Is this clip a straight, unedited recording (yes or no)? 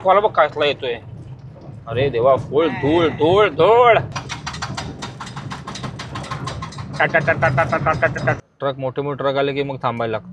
no